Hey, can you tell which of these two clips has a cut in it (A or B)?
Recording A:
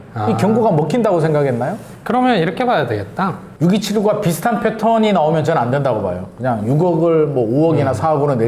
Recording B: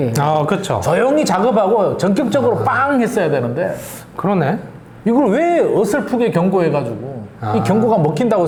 A